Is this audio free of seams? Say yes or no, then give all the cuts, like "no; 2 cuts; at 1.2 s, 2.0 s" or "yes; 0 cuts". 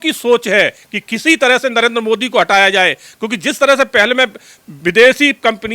yes; 0 cuts